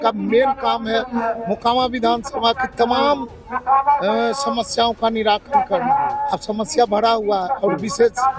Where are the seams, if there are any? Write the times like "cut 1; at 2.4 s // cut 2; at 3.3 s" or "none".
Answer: none